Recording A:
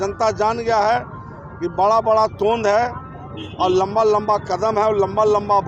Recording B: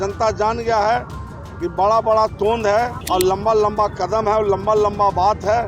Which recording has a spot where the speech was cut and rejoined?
B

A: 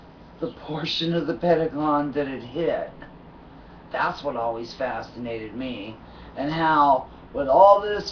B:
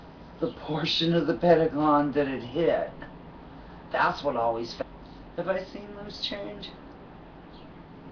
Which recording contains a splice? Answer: A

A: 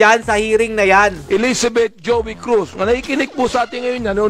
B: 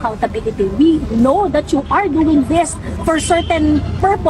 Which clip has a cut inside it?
A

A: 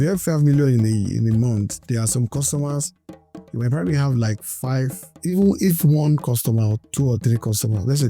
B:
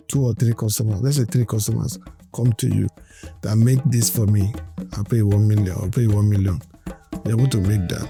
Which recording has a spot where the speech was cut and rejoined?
A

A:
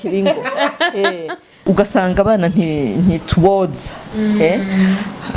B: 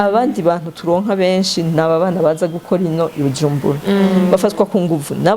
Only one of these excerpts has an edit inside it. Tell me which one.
A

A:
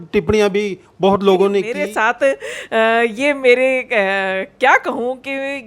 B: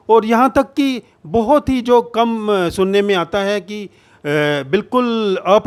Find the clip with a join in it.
A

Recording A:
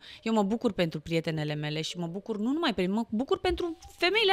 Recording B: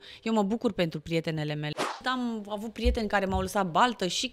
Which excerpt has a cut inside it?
B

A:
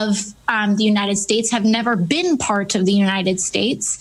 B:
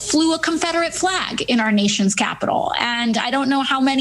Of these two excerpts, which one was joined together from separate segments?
B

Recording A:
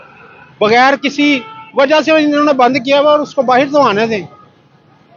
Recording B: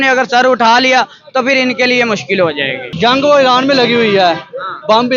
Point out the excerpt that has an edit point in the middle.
B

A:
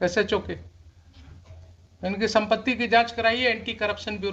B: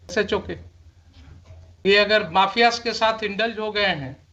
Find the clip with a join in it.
B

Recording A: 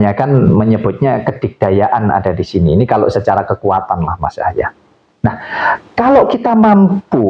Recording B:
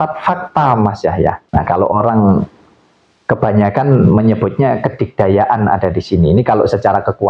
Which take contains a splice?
B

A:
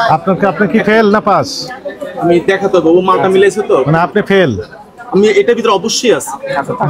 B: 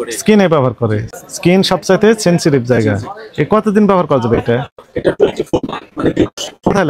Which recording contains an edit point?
B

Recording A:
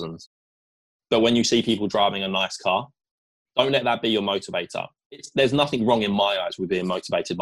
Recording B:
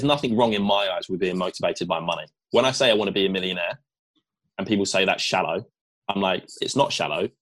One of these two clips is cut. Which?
A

